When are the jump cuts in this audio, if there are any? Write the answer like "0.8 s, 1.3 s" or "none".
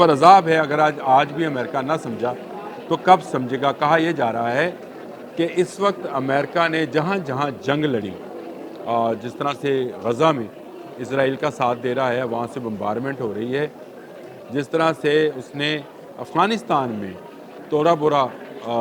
none